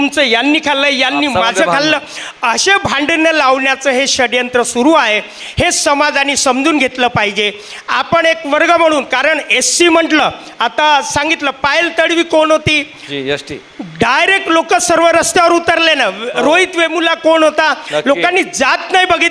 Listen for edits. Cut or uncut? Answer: uncut